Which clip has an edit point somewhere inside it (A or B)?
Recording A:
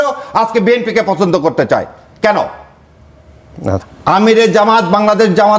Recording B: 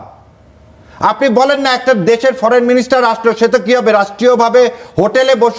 A